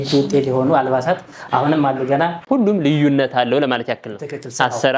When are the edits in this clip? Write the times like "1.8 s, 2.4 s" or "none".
2.4 s